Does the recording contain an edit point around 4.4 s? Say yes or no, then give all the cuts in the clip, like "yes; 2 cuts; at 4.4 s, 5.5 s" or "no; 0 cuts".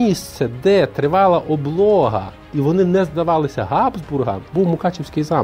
yes; 1 cut; at 4.4 s